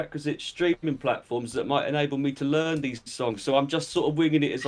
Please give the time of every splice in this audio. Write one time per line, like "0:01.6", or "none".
none

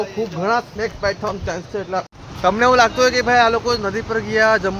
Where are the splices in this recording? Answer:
0:02.1

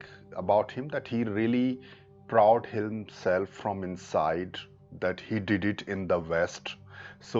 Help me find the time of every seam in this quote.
none

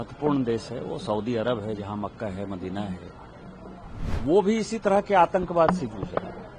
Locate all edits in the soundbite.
0:04.1

